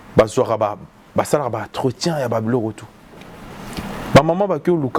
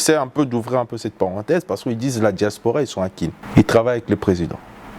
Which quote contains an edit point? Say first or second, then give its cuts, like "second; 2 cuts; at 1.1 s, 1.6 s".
second; 1 cut; at 3.4 s